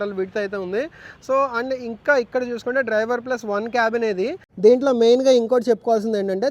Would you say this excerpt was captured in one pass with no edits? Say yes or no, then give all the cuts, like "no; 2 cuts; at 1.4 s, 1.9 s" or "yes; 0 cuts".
no; 1 cut; at 4.5 s